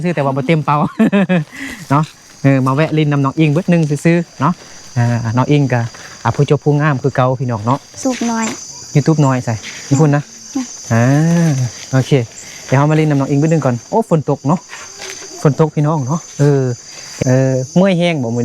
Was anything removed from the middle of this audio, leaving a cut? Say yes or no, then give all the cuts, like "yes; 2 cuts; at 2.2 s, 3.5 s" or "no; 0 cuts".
yes; 2 cuts; at 8.0 s, 17.1 s